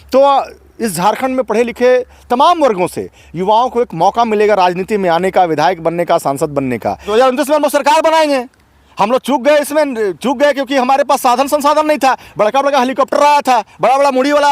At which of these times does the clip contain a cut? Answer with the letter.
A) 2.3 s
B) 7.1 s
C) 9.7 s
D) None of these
B